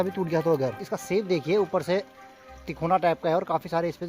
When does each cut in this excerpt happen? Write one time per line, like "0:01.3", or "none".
0:01.3